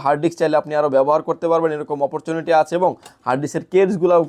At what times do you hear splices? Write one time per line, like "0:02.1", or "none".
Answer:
none